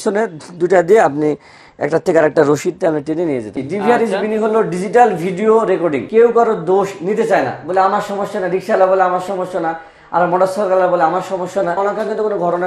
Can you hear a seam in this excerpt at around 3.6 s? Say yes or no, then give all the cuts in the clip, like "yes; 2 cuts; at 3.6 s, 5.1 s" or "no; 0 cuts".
yes; 3 cuts; at 3.6 s, 6.1 s, 11.8 s